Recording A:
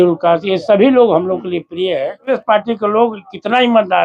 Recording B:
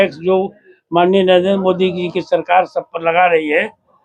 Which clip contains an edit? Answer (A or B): A